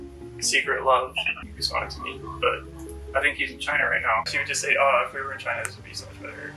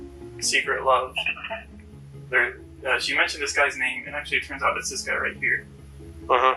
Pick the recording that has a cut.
first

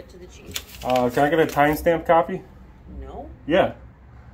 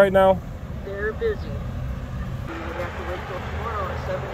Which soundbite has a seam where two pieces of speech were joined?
second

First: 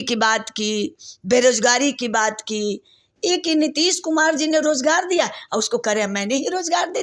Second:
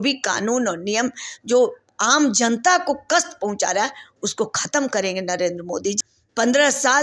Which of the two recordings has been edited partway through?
second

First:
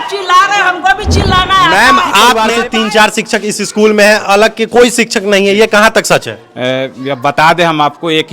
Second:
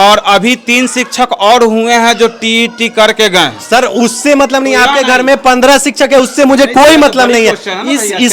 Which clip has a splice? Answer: first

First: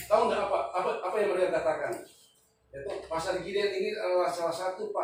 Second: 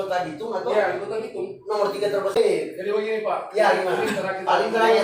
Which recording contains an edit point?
second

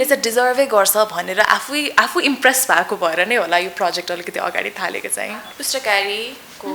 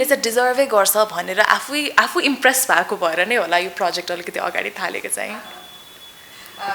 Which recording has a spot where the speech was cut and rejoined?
first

